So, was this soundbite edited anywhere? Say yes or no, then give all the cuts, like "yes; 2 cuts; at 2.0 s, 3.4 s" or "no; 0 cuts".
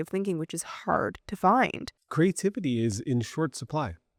no; 0 cuts